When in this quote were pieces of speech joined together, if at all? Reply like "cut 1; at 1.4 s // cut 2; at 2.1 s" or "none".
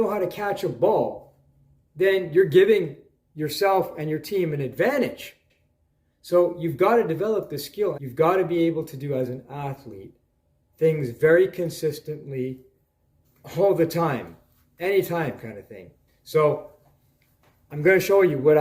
cut 1; at 8.0 s // cut 2; at 16.1 s